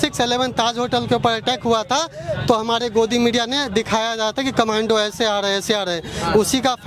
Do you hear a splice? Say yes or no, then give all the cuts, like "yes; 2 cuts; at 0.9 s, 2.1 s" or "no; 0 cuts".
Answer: no; 0 cuts